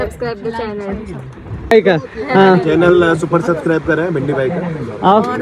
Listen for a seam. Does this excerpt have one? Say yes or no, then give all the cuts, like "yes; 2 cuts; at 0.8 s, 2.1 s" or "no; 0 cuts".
yes; 1 cut; at 1.7 s